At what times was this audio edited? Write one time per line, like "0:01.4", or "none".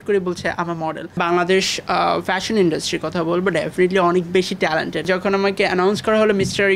0:01.2
0:05.1